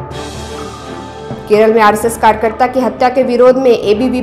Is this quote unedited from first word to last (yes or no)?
no